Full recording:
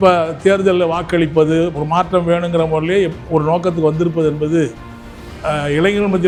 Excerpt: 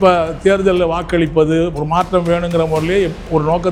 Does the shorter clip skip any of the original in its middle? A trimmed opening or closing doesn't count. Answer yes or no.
no